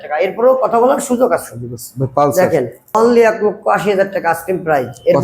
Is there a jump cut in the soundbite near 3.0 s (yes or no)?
yes